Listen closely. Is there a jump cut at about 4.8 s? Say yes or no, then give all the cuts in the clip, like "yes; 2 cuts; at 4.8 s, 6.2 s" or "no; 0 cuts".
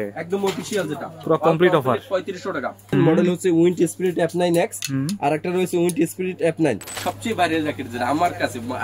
no; 2 cuts; at 2.9 s, 6.9 s